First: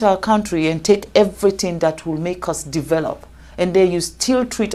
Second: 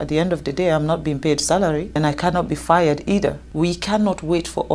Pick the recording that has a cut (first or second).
second